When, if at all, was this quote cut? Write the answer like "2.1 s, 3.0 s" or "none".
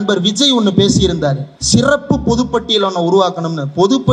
1.5 s